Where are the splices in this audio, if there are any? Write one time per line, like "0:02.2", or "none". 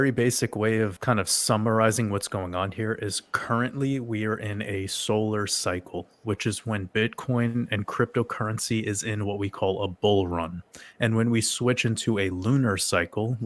0:00.9